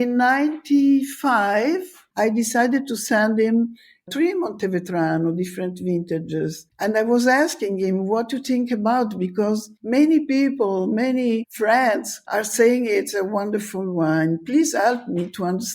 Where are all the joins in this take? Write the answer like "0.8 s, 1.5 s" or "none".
6.7 s